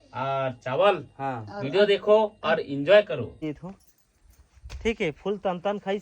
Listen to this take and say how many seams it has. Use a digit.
1